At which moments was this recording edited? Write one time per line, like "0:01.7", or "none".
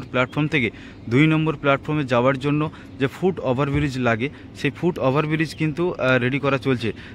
none